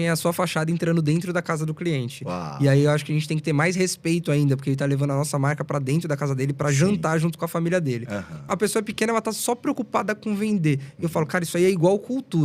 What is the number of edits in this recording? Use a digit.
1